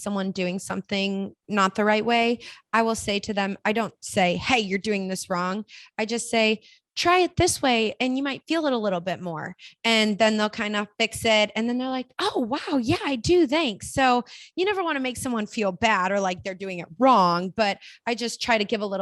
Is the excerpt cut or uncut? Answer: cut